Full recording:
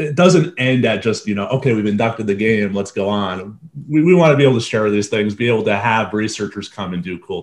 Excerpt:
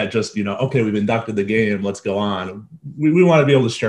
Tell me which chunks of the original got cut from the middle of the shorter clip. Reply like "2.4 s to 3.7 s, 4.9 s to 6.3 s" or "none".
none